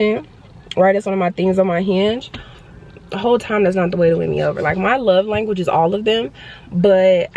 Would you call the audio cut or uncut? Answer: uncut